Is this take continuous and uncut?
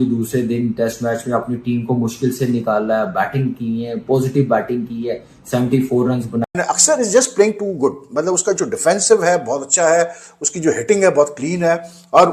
no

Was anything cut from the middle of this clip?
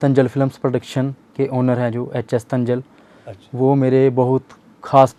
no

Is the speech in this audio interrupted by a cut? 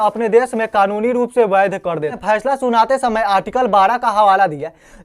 yes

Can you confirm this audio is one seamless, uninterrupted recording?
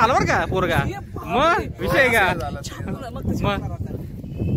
yes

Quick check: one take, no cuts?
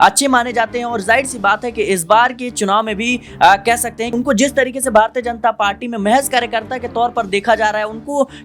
no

